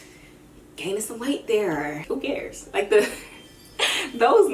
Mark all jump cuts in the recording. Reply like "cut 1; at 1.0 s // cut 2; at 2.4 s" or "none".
cut 1; at 2.0 s